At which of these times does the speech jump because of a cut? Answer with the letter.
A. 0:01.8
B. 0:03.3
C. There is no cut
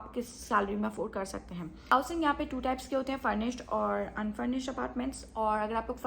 A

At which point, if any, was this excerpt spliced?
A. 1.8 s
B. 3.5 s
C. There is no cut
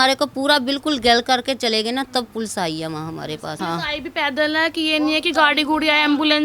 B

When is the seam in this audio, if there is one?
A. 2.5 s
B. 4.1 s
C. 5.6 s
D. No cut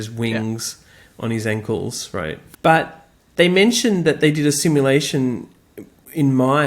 A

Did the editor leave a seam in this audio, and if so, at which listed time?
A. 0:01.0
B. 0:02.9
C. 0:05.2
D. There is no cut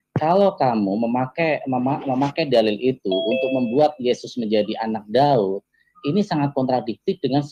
D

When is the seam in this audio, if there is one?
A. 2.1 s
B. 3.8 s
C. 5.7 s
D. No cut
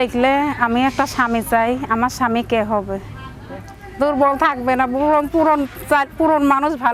B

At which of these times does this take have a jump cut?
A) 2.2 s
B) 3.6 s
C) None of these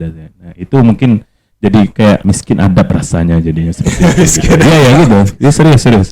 A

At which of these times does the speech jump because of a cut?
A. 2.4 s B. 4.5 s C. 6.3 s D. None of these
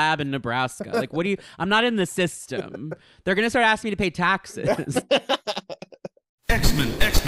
C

